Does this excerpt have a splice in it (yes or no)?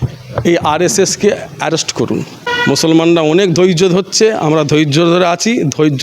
yes